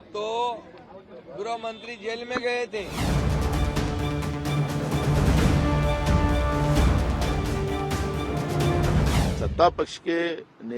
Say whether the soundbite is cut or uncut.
cut